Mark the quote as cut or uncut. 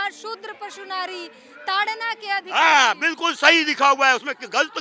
uncut